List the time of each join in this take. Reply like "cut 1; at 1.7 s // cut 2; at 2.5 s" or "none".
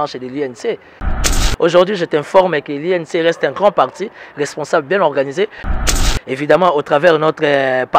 cut 1; at 1.3 s // cut 2; at 5.8 s